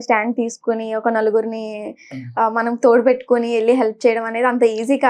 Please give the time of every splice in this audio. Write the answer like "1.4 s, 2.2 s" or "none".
none